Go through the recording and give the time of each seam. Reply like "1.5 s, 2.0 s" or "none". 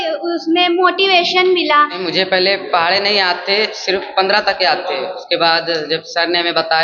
2.0 s

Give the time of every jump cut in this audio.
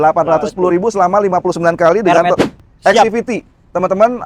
2.5 s

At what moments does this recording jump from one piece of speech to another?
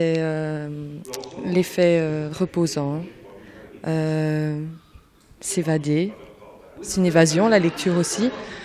none

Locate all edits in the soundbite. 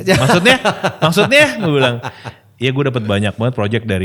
none

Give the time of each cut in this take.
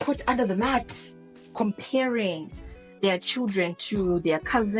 1.4 s

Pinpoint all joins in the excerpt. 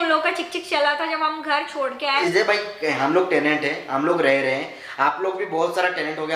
2.2 s

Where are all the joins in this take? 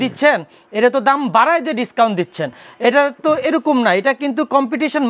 none

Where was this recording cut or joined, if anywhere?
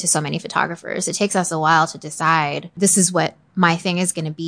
2.8 s

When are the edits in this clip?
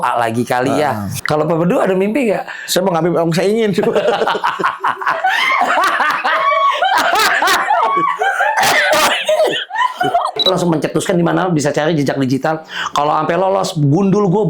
1.1 s, 10.5 s

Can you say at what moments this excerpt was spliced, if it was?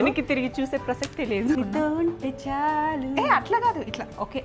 1.6 s

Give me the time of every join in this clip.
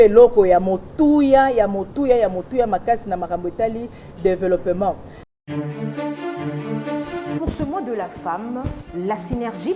5.2 s

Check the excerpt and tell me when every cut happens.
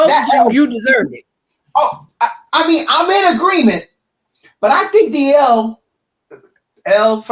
none

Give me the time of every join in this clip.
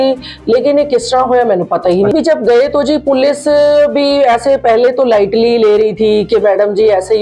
2.1 s

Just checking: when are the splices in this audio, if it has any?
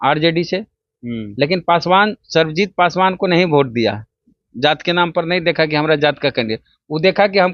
none

